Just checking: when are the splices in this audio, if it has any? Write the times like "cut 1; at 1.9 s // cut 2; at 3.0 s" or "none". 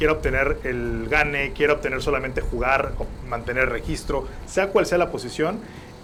none